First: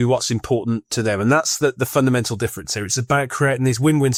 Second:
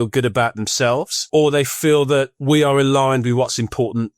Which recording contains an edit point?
second; 2 cuts; at 1.2 s, 2.3 s

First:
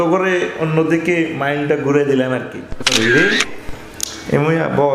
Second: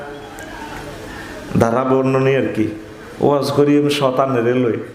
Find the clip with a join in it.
first; 1 cut; at 2.8 s

